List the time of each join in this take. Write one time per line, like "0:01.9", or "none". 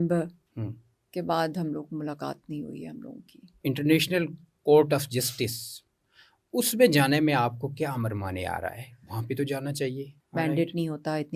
0:03.5
0:10.1